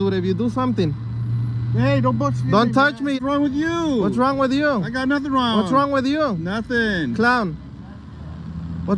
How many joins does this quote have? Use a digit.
1